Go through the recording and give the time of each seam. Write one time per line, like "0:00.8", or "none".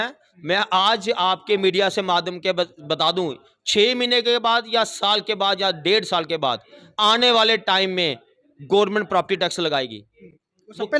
none